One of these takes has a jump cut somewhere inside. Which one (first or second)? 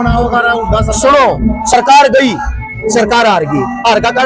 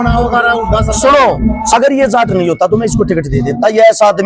second